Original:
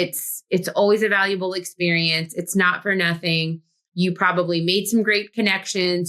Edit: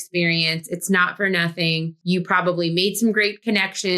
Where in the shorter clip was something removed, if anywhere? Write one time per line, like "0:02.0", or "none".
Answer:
0:01.9